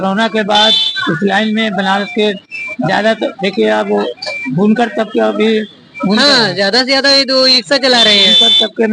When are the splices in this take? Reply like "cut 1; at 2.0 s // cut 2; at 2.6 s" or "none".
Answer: none